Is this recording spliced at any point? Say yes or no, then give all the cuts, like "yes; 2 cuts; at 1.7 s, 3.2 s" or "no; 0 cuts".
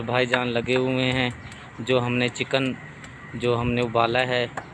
no; 0 cuts